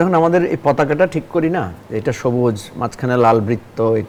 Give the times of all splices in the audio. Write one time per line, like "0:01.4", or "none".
none